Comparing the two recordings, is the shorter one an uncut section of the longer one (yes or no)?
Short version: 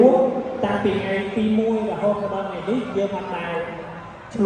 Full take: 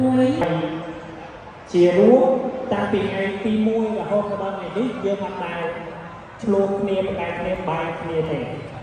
yes